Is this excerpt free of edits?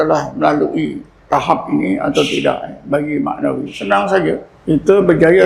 no; 3 cuts; at 1.1 s, 3.7 s, 4.5 s

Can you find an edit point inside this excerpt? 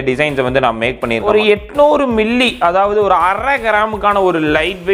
yes; 1 cut; at 1.2 s

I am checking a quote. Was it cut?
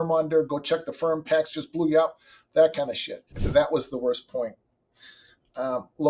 yes; 1 cut; at 3.4 s

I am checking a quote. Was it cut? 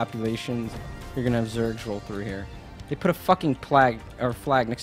yes; 1 cut; at 1.2 s

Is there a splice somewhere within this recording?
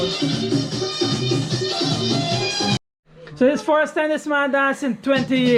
no; 0 cuts

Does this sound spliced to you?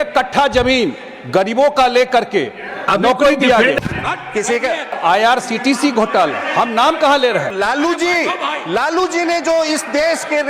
yes; 3 cuts; at 3.8 s, 5.0 s, 7.5 s

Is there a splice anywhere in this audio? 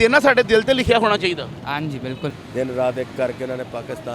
yes; 1 cut; at 2.3 s

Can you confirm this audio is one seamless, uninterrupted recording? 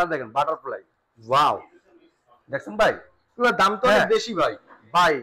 yes; 0 cuts

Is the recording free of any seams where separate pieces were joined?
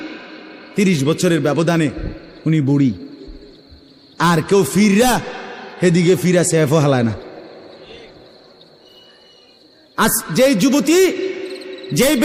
yes; 0 cuts

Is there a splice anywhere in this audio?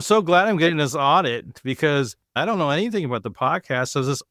yes; 1 cut; at 2.3 s

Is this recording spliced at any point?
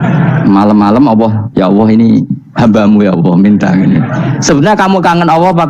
yes; 1 cut; at 1.4 s

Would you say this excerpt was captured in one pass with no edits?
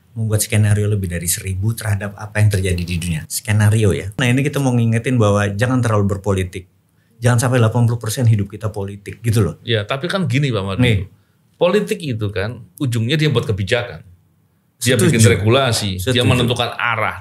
no; 1 cut; at 4.2 s

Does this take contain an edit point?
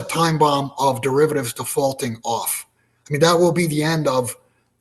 no; 0 cuts

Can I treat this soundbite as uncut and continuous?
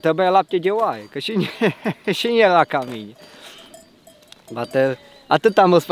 yes; 0 cuts

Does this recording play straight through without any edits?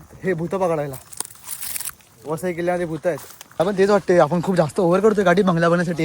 no; 1 cut; at 3.6 s

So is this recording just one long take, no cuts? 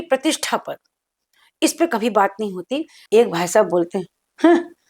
no; 1 cut; at 2.9 s

